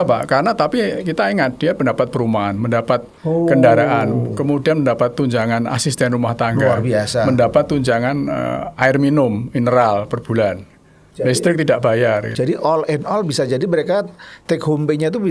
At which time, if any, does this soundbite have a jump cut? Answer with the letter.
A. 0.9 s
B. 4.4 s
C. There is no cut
C